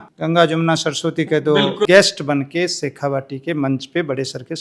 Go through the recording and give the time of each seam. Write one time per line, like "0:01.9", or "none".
0:01.9

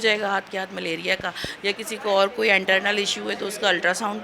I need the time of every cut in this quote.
none

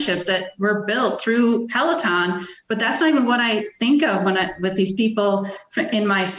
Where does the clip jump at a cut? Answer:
none

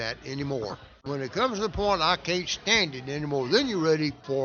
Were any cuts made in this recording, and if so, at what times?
0:01.0

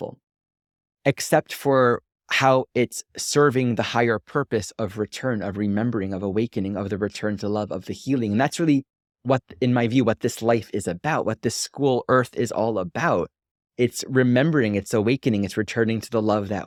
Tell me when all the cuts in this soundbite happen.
none

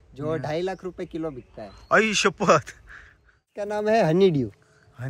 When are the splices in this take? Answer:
0:03.6

